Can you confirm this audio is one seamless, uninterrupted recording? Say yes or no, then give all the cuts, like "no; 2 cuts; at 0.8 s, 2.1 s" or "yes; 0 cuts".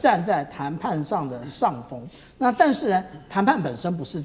yes; 0 cuts